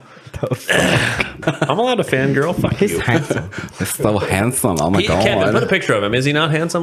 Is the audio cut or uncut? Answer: cut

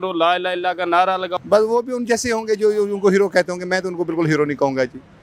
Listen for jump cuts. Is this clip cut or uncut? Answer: cut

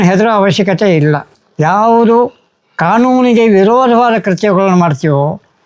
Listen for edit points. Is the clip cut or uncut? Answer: cut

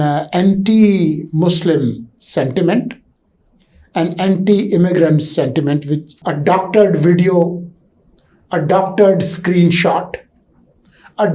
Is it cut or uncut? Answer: cut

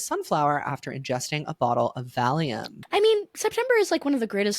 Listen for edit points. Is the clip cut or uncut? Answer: cut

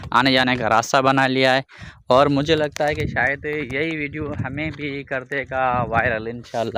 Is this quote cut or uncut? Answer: uncut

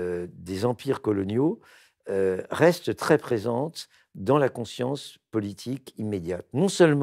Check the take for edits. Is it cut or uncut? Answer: uncut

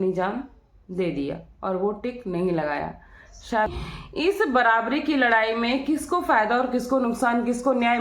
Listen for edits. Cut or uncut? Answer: cut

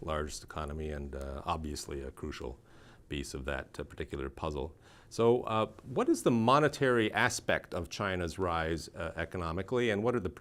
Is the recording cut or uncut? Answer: uncut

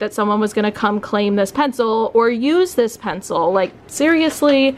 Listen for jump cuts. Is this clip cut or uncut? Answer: uncut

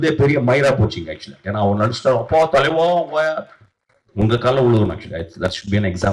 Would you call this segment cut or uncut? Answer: uncut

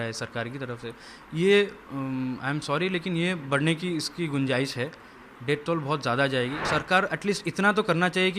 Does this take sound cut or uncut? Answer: cut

